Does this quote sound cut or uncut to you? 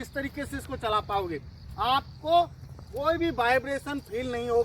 uncut